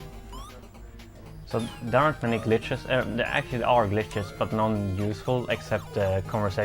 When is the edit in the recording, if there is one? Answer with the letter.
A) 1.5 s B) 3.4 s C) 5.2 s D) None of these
A